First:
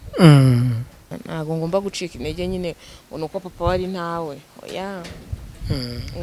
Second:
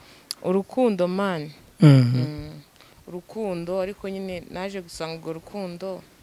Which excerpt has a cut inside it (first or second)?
first